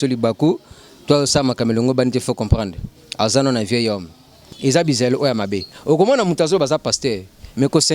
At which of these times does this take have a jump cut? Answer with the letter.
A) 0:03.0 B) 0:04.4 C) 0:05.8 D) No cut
B